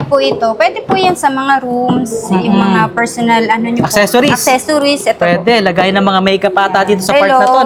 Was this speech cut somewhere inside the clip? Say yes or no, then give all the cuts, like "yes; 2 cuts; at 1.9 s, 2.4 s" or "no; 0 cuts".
no; 0 cuts